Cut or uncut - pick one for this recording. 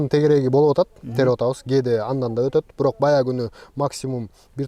uncut